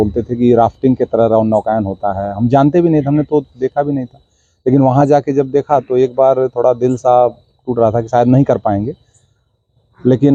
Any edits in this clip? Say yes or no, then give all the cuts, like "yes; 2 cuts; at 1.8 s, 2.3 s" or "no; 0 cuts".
no; 0 cuts